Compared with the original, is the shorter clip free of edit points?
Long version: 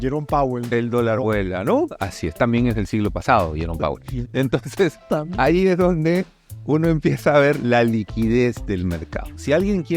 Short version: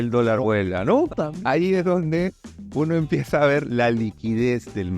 no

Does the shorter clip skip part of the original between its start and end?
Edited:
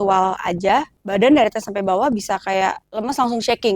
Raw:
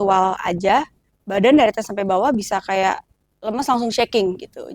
yes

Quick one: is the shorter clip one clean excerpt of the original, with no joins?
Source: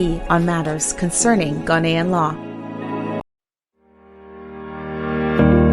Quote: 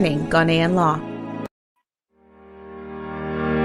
no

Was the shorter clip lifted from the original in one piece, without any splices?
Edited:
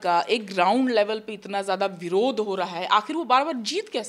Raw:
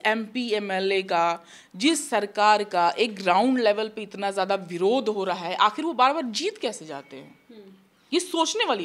yes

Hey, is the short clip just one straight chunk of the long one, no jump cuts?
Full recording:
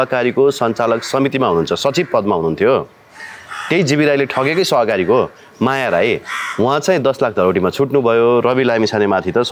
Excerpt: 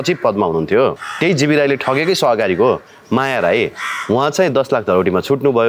no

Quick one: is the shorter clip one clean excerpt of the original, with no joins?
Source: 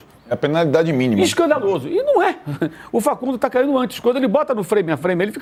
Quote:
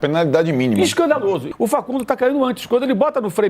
no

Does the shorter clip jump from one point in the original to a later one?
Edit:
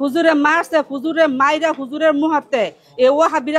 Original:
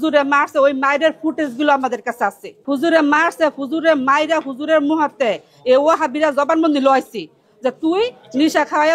no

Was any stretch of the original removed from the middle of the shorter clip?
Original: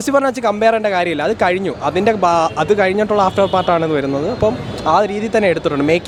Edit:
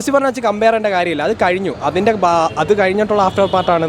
no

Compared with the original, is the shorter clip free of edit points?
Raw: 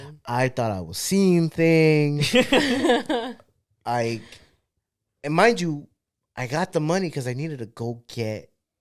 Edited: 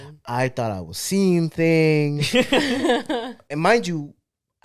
no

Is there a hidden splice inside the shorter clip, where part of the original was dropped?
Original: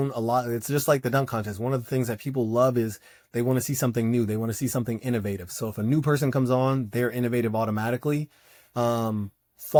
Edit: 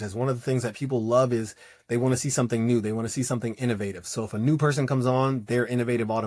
no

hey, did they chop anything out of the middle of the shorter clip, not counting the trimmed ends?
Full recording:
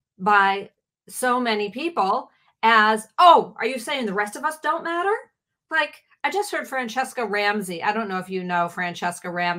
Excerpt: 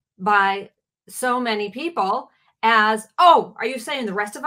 no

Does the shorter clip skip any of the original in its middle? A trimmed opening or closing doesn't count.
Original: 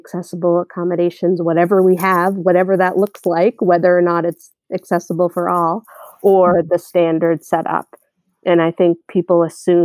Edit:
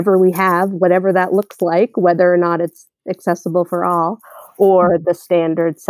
no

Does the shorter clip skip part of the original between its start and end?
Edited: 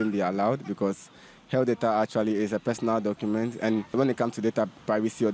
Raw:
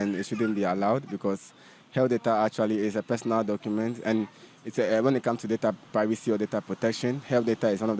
yes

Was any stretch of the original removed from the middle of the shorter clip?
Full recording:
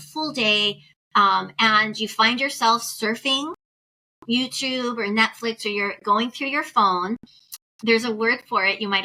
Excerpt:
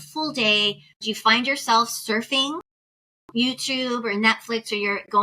yes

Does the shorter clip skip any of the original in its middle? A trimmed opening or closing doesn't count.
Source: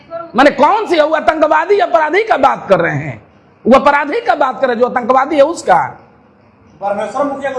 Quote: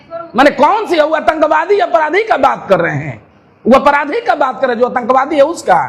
no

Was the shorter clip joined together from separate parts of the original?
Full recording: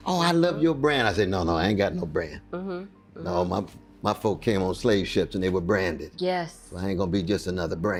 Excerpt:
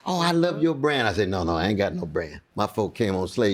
yes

